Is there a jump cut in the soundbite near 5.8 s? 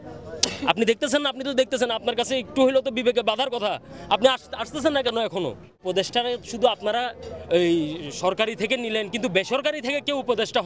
yes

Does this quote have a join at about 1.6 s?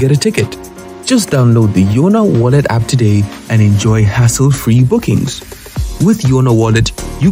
no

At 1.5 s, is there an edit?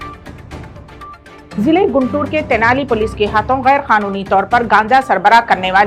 yes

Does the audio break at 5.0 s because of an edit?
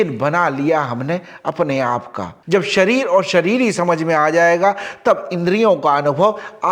no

